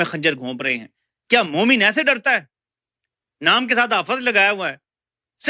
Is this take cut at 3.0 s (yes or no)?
no